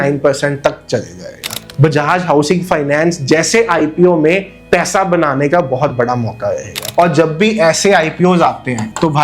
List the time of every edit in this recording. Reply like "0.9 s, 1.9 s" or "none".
1.6 s, 6.7 s